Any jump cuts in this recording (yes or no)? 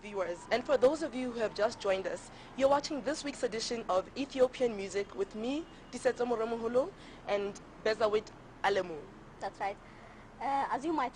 no